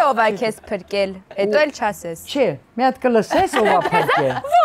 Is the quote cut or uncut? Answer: uncut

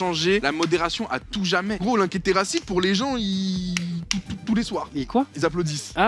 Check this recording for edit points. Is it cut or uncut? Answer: cut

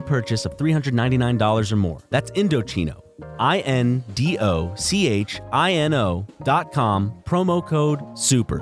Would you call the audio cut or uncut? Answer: uncut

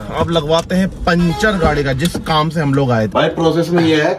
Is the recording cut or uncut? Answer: cut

